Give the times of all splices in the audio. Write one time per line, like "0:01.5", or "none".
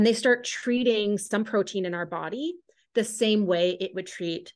none